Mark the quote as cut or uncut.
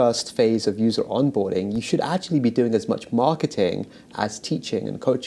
uncut